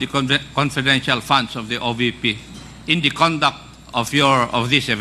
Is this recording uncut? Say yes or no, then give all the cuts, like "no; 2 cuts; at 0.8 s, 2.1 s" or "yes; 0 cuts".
yes; 0 cuts